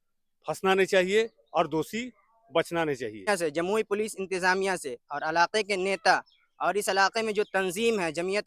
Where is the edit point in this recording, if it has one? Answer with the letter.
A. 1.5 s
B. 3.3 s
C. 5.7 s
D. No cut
B